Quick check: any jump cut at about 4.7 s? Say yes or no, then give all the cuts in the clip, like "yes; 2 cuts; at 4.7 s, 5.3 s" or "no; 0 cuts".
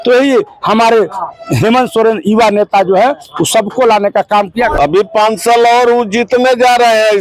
yes; 1 cut; at 4.7 s